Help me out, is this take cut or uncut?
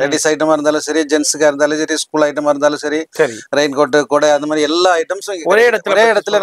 uncut